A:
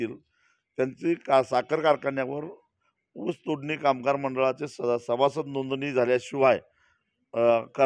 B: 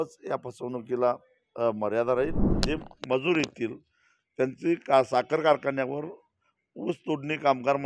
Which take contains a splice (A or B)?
B